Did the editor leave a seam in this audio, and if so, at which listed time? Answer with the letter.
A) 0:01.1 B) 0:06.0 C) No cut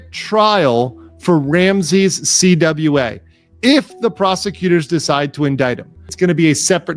B